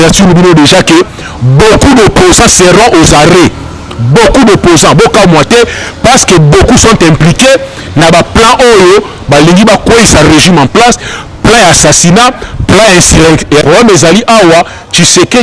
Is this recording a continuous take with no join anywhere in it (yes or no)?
no